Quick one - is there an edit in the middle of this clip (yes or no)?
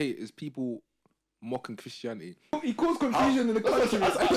yes